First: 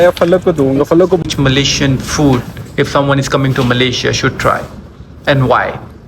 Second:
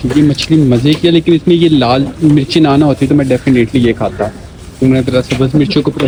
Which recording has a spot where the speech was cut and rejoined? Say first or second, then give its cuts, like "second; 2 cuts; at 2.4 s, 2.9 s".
first; 1 cut; at 1.2 s